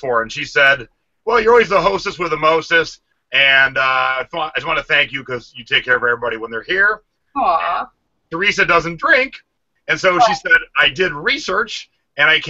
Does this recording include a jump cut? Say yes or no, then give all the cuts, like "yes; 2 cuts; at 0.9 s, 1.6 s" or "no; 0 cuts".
yes; 1 cut; at 2.0 s